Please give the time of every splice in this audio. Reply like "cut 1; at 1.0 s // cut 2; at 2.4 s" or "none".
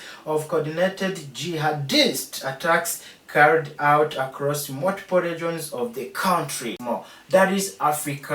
cut 1; at 6.8 s